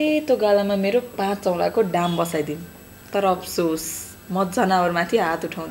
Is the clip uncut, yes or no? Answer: yes